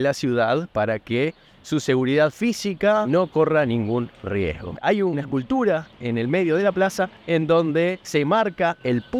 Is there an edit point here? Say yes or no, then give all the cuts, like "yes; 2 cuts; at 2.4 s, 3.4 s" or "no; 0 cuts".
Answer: no; 0 cuts